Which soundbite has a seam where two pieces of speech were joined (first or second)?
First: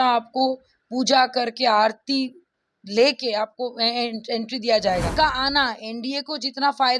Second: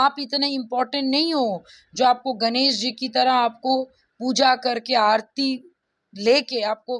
first